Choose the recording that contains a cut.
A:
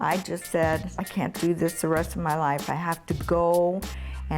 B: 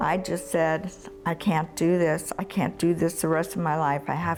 A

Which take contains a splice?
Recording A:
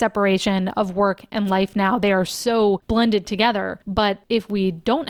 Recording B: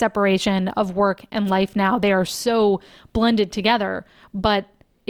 A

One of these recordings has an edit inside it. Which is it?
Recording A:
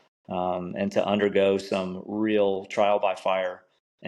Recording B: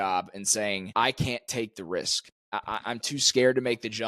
B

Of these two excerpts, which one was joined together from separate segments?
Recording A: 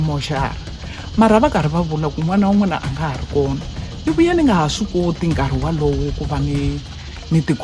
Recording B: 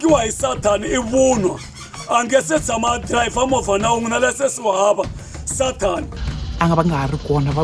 B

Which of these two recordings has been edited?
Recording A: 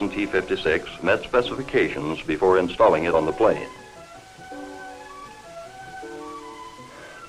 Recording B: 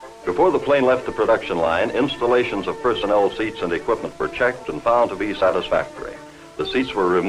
B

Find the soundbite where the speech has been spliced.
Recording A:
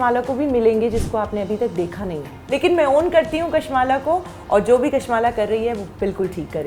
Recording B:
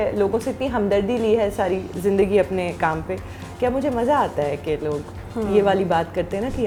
A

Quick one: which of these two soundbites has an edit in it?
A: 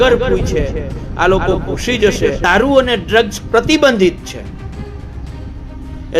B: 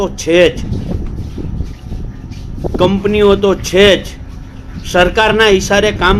A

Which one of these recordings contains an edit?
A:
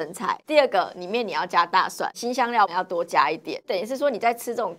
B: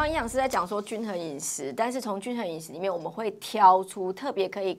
A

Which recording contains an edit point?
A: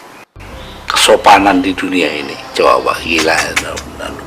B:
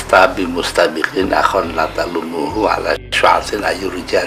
A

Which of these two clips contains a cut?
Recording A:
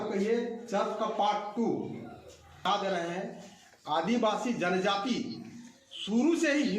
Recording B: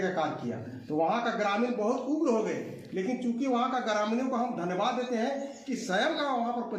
A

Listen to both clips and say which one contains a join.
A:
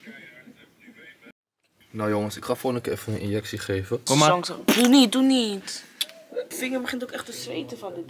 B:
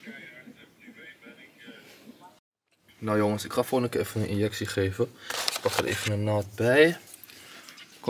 A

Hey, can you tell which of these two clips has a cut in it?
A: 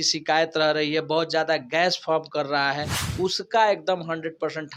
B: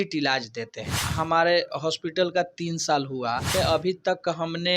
B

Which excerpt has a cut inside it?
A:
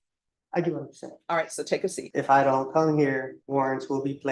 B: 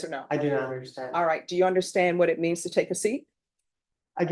A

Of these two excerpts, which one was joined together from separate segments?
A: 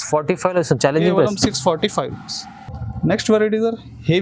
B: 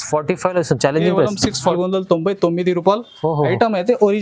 B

